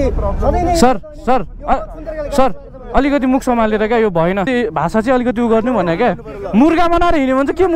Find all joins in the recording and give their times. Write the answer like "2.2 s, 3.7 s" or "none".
4.5 s